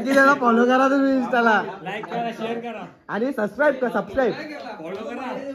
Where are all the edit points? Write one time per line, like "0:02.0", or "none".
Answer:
none